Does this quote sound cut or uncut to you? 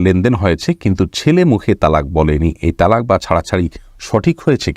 uncut